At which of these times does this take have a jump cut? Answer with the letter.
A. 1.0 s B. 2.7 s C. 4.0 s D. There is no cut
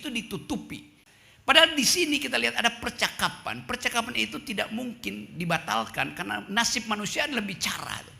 A